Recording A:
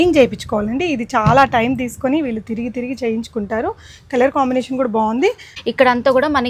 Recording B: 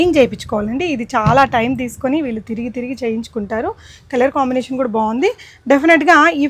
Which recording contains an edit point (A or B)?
A